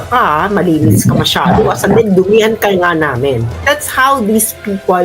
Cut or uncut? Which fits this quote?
cut